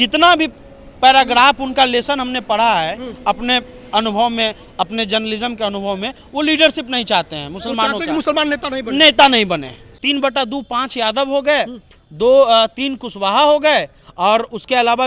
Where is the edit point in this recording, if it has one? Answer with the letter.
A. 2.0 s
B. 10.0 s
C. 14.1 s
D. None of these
B